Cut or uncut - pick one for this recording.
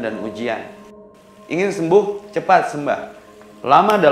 cut